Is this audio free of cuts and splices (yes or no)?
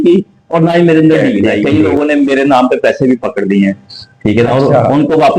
no